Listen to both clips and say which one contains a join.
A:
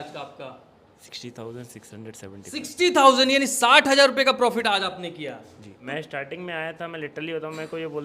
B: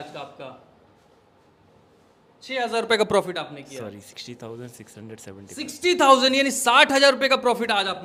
A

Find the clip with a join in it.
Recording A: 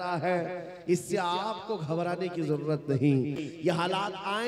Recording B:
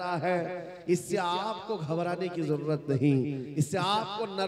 A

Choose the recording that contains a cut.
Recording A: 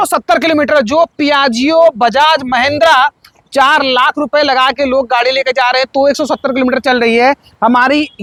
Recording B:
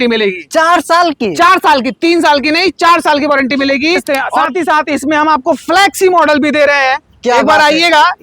B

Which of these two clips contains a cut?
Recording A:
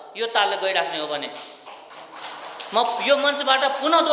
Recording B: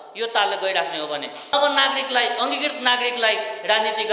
B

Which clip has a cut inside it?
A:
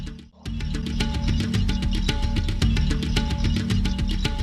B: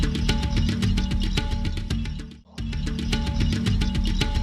A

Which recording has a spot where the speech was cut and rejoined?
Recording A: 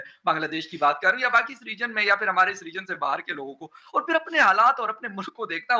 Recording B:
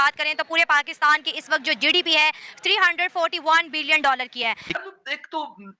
B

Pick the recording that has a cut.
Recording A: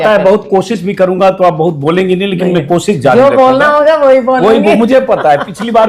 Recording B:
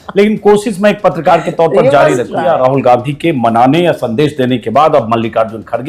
B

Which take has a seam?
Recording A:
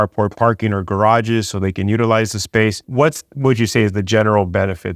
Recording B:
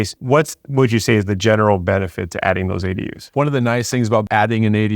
B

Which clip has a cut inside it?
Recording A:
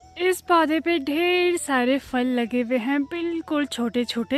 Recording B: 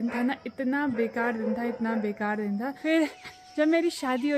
B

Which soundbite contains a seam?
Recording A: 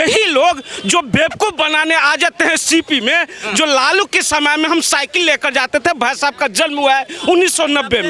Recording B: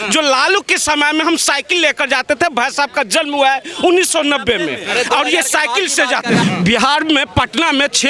B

